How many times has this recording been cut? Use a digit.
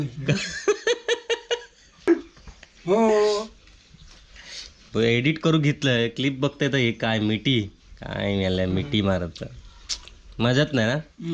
1